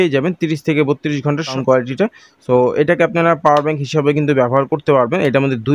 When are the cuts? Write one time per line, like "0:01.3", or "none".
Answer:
0:01.6